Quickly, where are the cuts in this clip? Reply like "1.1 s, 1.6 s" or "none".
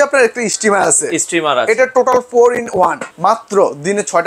3.1 s